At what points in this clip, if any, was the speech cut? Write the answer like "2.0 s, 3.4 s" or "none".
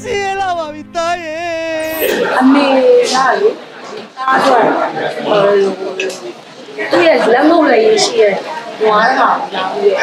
2.1 s